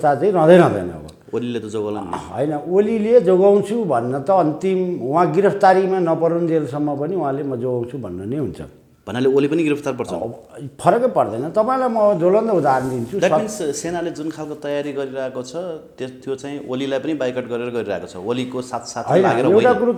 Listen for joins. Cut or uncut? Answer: uncut